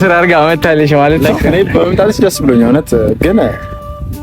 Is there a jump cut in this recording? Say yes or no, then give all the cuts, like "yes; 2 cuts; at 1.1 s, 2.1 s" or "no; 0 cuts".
yes; 1 cut; at 1.3 s